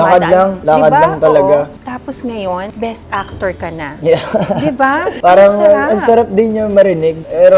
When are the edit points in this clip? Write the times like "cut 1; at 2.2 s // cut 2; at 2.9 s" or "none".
cut 1; at 1.7 s // cut 2; at 2.7 s // cut 3; at 5.1 s